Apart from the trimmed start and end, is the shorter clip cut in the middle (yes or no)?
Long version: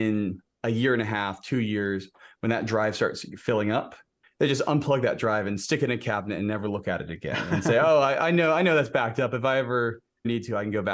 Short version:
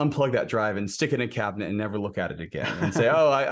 no